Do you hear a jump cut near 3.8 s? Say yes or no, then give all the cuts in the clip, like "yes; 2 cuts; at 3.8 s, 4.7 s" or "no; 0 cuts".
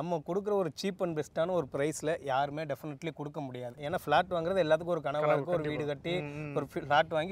yes; 1 cut; at 3.8 s